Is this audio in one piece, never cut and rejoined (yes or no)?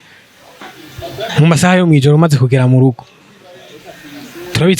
yes